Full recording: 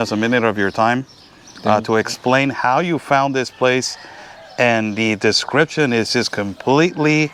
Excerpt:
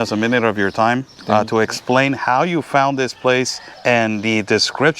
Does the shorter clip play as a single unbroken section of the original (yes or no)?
no